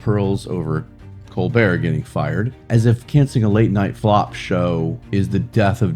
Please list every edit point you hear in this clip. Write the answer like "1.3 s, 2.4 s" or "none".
2.6 s, 3.9 s, 5.0 s

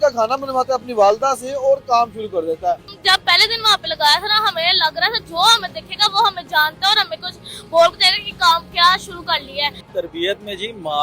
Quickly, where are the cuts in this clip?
2.9 s, 9.8 s

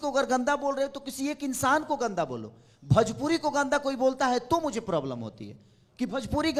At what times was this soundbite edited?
none

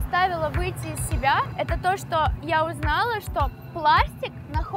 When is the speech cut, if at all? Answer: 1.5 s

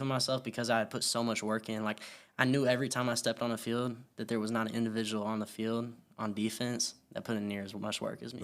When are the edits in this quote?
none

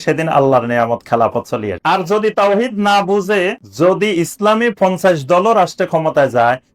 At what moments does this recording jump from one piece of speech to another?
1.7 s, 3.6 s

